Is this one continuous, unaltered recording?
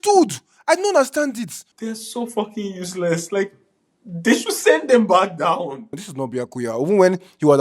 no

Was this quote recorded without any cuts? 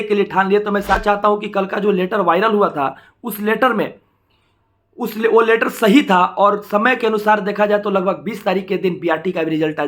no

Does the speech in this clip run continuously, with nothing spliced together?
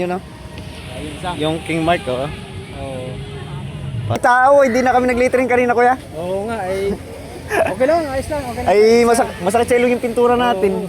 no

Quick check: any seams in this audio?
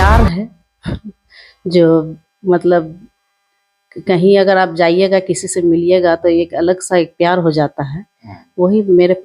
no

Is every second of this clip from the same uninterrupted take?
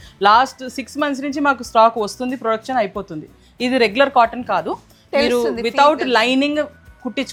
yes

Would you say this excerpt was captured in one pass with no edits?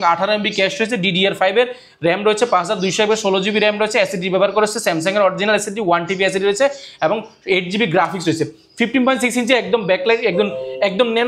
yes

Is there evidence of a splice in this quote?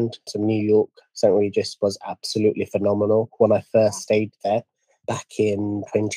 no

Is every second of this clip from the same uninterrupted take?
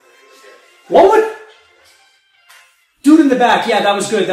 yes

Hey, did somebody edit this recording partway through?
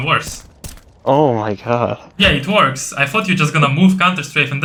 no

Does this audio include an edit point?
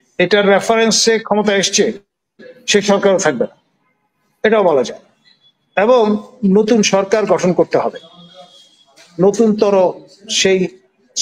no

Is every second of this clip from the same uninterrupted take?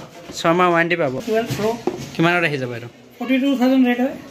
no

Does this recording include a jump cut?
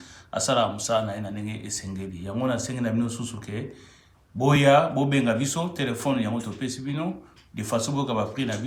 no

